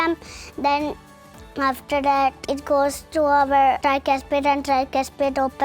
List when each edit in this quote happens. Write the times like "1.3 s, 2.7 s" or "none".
2.4 s, 3.8 s